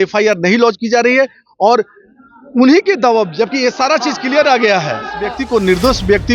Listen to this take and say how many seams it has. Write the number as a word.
one